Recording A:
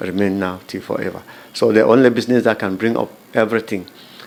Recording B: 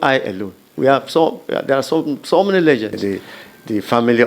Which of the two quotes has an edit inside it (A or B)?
B